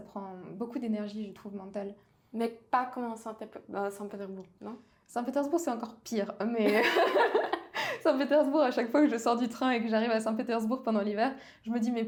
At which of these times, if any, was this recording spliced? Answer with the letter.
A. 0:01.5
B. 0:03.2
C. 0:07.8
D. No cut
D